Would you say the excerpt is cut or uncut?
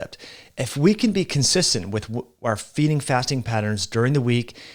uncut